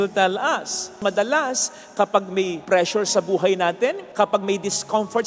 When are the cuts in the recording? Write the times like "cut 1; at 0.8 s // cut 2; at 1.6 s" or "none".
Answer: cut 1; at 1.0 s // cut 2; at 2.6 s // cut 3; at 4.0 s